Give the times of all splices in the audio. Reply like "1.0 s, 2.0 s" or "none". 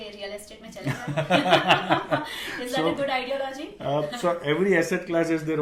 none